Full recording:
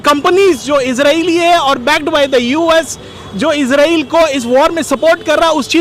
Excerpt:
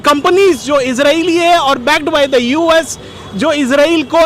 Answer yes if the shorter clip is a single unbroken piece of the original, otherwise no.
yes